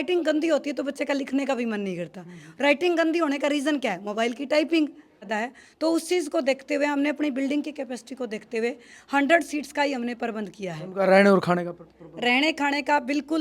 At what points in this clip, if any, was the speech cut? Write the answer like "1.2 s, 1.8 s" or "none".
5.3 s

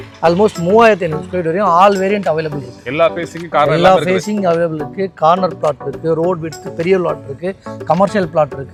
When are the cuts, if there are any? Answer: none

